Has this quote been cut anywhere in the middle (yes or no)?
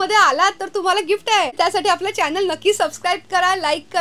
yes